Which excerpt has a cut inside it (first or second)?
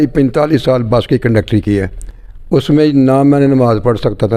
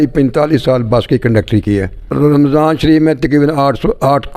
second